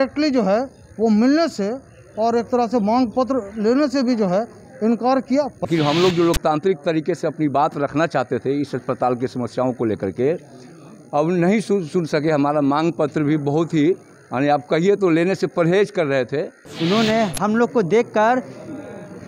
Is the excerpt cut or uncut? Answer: cut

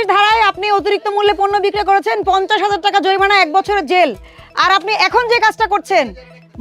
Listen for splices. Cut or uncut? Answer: uncut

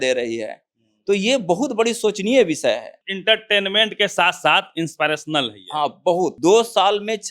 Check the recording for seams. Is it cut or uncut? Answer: cut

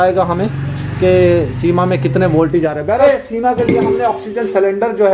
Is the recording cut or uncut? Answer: cut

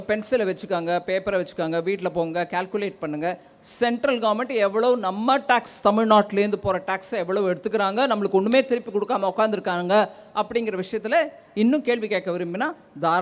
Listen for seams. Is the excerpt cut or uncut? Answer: uncut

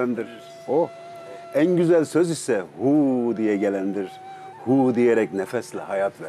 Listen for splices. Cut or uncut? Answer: uncut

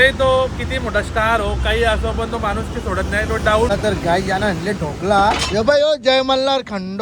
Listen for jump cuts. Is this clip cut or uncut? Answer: cut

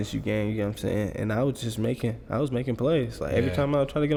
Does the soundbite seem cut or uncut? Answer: uncut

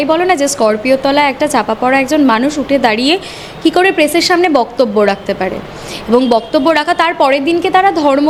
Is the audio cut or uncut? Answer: uncut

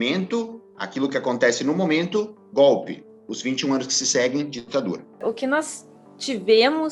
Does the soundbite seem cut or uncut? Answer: cut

